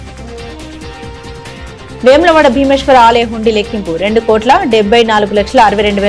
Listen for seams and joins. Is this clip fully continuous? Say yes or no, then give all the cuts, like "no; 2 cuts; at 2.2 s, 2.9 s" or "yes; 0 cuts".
yes; 0 cuts